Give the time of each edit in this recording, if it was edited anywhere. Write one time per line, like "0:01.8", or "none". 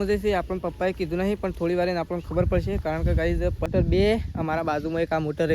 0:03.7